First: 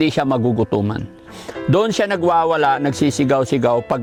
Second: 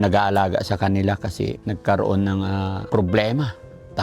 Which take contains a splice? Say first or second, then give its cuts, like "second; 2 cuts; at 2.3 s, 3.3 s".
second; 2 cuts; at 1.7 s, 2.9 s